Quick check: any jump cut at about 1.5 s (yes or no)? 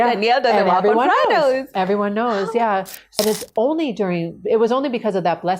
no